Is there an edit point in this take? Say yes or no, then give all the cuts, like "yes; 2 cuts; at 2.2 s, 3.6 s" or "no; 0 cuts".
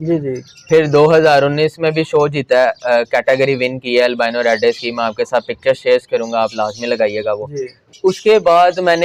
no; 0 cuts